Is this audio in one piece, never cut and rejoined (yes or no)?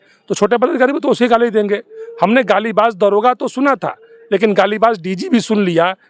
yes